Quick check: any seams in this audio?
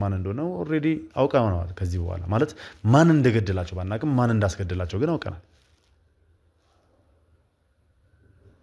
no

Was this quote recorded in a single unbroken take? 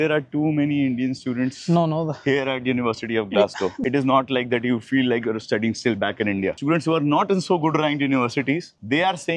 no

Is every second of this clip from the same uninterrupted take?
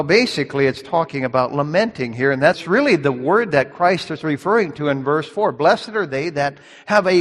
no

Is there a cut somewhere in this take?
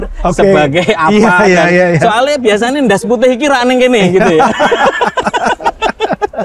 no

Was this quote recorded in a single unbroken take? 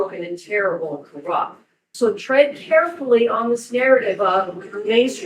no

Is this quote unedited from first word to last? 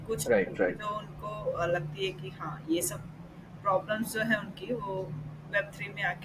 yes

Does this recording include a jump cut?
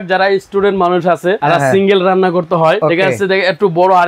yes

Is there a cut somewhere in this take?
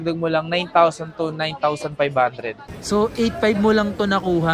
yes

